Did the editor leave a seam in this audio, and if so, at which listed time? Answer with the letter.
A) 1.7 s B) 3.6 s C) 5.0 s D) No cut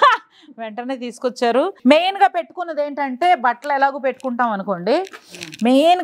A